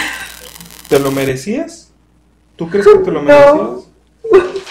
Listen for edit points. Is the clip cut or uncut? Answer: uncut